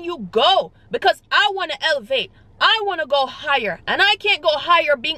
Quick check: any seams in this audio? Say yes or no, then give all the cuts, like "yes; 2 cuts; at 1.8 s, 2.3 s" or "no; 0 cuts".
no; 0 cuts